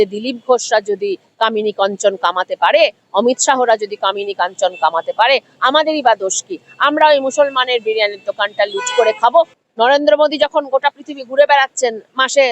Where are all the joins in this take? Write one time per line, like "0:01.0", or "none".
0:09.5